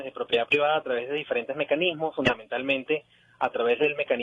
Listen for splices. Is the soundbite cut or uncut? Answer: cut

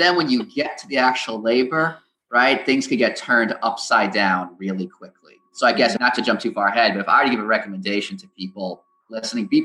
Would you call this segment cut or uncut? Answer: cut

